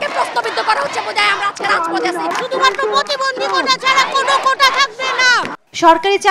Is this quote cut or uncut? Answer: uncut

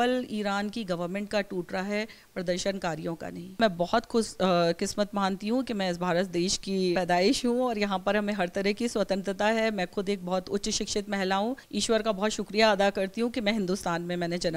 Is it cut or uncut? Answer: cut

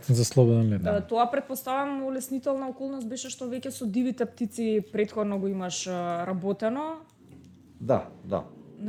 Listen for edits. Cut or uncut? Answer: uncut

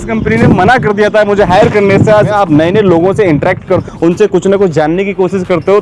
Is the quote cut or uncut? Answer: cut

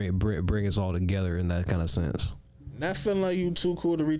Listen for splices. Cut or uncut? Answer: uncut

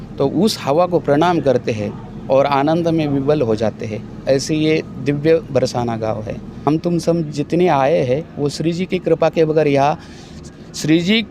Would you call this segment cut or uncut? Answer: cut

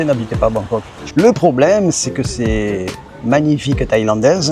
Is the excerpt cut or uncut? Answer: cut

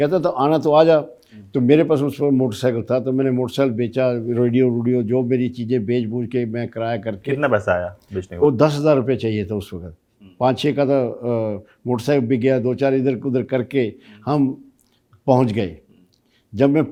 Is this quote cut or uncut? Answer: uncut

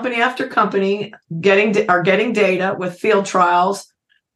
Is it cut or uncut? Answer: uncut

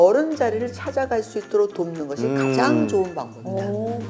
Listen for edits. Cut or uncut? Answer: uncut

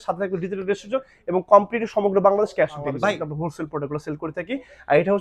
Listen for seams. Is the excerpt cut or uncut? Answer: cut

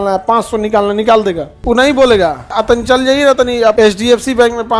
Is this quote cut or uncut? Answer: cut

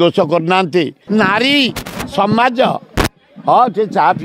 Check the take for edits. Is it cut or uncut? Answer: cut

